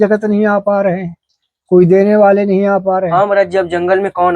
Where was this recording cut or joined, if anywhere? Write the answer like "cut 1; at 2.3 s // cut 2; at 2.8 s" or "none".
none